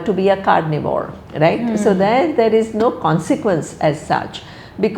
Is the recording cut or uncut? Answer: uncut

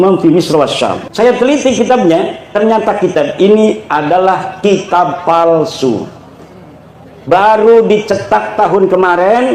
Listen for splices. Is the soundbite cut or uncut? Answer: cut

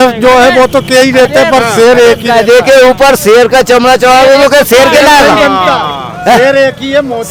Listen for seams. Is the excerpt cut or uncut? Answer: uncut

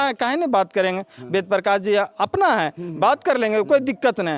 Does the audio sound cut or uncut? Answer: uncut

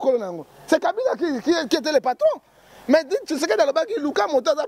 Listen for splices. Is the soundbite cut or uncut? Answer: uncut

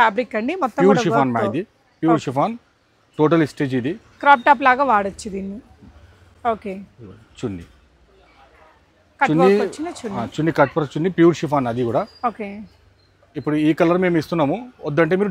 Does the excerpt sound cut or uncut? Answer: uncut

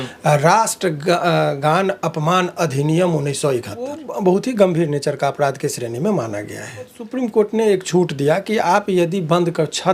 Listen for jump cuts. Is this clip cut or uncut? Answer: cut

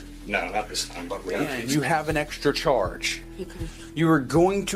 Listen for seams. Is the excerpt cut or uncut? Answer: cut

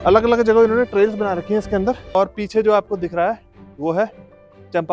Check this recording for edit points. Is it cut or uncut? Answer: cut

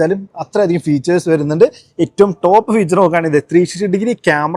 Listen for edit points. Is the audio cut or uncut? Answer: uncut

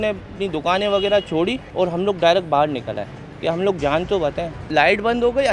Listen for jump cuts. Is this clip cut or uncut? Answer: cut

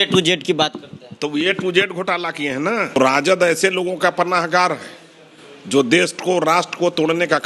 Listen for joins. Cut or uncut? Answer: cut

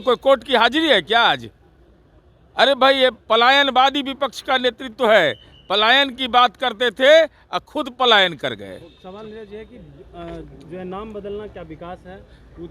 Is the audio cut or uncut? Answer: uncut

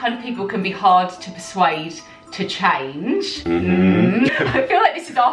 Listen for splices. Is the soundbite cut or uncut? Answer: cut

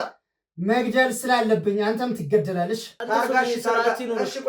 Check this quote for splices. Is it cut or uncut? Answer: cut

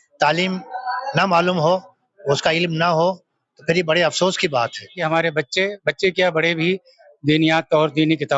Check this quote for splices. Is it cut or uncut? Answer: cut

